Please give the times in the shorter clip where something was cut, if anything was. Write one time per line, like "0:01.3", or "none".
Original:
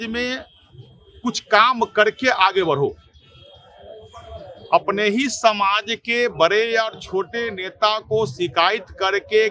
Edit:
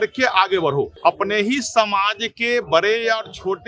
0:00.9